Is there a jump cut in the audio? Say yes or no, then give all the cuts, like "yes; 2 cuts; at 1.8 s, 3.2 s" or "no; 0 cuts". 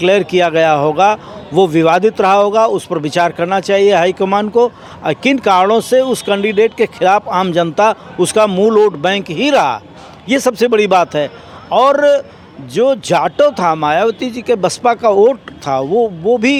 no; 0 cuts